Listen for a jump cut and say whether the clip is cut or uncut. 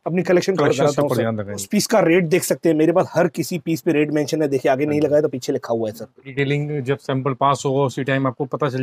cut